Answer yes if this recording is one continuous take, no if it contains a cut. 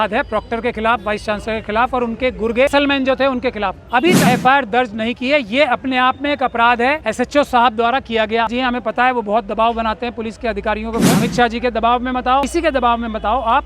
no